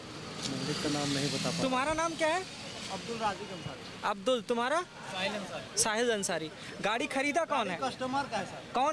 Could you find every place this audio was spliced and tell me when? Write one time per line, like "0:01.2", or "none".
none